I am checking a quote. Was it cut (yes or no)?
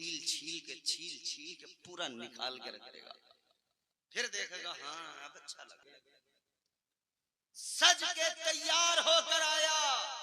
yes